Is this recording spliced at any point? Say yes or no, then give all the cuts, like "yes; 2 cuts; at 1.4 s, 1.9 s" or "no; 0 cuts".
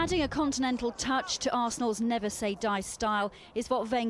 no; 0 cuts